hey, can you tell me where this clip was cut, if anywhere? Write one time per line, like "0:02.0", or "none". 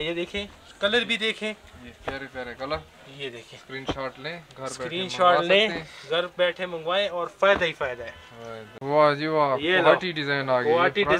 0:08.7